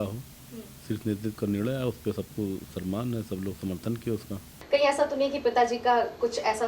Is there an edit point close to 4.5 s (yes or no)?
yes